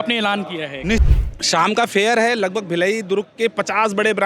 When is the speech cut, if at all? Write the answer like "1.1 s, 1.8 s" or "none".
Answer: 1.0 s